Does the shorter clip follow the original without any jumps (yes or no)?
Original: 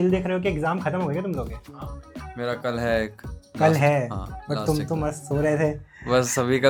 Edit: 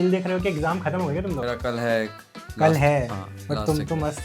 no